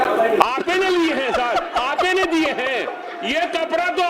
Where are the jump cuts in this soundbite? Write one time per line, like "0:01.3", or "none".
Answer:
none